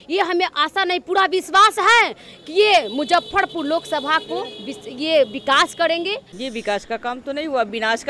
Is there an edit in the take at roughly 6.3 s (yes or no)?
yes